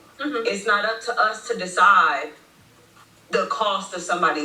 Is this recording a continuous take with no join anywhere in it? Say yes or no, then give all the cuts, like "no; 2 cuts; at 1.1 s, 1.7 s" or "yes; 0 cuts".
yes; 0 cuts